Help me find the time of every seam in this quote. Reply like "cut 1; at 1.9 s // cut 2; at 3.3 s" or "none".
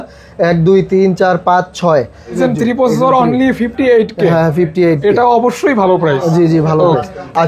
cut 1; at 2.4 s